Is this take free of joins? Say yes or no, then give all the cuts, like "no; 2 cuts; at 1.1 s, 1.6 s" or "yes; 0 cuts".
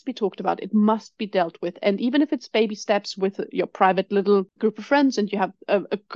no; 1 cut; at 4.5 s